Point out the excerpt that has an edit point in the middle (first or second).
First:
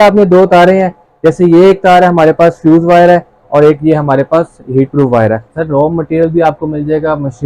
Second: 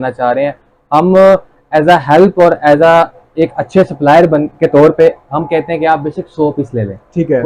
first